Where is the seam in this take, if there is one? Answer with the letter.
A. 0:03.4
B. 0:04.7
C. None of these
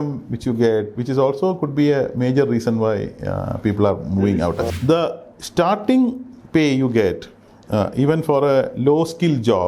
B